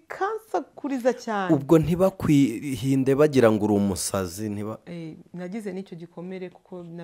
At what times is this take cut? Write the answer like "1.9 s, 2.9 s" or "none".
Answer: none

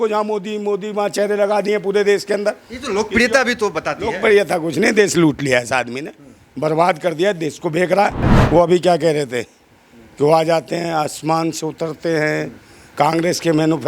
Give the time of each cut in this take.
8.3 s

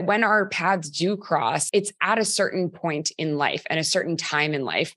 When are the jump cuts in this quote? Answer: 1.6 s

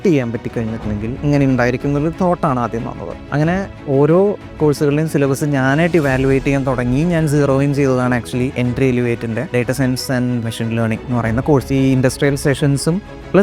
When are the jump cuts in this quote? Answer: 1.2 s, 3.1 s, 8.5 s, 10.4 s, 11.7 s

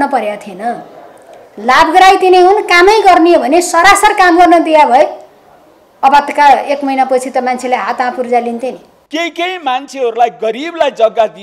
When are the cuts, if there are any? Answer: 8.9 s

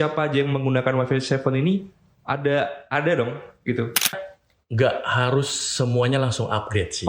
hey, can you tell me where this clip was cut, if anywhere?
4.1 s

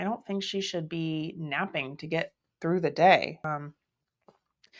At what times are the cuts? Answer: 3.4 s

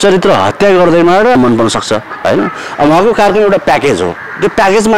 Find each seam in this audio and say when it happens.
1.3 s

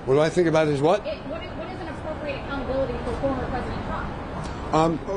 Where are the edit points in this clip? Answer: 4.1 s

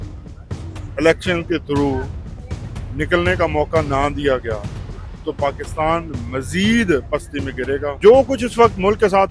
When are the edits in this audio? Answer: 8.0 s

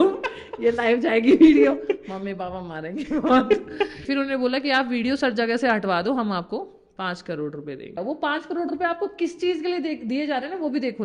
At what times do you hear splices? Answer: 4.0 s, 7.9 s

